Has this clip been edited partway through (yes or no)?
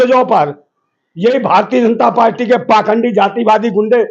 no